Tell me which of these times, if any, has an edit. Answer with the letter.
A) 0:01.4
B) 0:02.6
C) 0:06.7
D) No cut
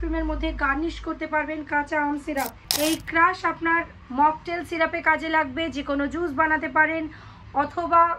B